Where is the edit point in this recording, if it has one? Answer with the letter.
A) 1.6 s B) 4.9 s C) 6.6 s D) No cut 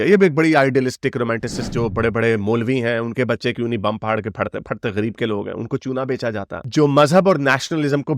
A